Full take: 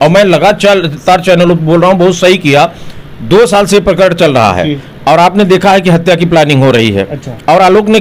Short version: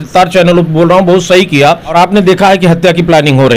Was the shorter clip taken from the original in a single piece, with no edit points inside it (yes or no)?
no